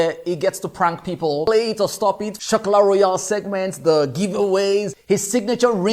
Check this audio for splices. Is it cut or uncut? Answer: cut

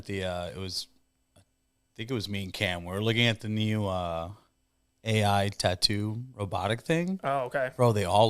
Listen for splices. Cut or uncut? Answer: uncut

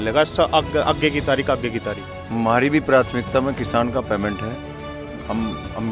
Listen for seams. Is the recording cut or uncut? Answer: uncut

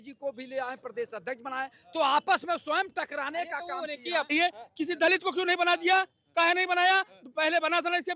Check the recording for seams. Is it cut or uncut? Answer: cut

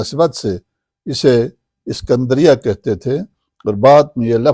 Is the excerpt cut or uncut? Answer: uncut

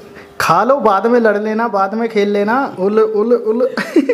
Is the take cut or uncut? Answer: cut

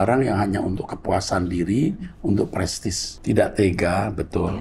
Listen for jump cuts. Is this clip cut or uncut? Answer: cut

